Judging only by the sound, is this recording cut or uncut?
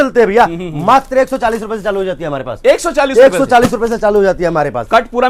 uncut